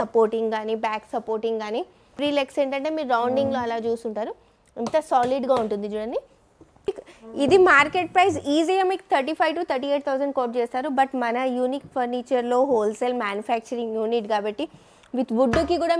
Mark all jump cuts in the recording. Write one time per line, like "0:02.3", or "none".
0:02.2
0:07.0